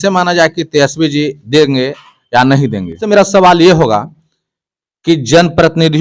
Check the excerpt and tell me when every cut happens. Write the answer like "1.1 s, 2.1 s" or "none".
3.0 s